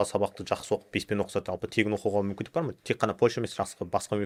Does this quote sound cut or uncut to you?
uncut